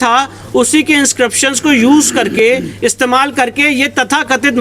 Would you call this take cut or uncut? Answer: uncut